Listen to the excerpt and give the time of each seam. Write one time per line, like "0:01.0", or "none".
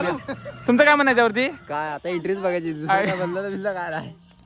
none